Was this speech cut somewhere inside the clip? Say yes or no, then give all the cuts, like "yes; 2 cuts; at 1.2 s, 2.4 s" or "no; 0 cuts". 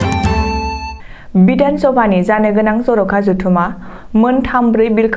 yes; 1 cut; at 1.0 s